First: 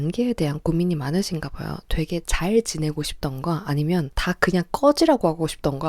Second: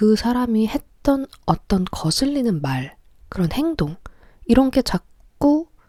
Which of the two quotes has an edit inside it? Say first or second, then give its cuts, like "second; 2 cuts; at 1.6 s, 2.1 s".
first; 1 cut; at 4.1 s